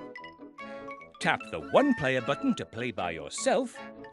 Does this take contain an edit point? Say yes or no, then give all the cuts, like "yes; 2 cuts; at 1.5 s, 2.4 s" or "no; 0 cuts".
yes; 1 cut; at 1.1 s